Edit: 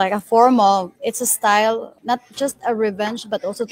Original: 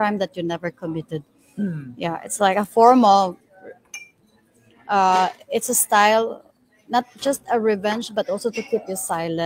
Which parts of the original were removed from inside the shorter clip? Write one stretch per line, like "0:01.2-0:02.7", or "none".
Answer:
0:03.4-0:05.4
0:06.4-0:06.8